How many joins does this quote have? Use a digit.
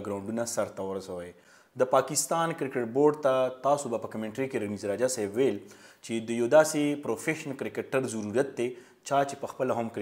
0